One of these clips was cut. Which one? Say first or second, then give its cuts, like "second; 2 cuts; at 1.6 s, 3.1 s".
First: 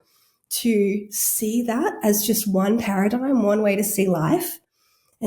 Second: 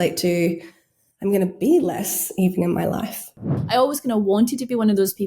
second; 1 cut; at 3.6 s